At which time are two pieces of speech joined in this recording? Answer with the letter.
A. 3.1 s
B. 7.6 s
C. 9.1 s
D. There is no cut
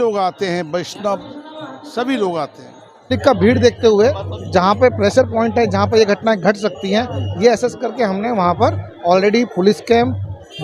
A